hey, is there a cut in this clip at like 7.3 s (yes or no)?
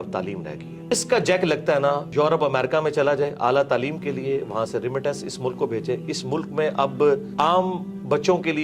yes